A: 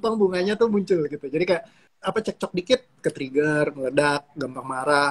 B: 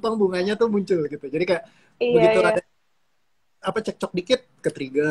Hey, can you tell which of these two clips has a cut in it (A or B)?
A